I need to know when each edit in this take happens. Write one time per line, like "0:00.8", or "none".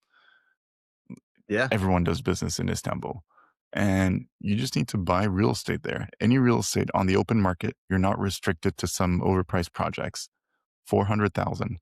none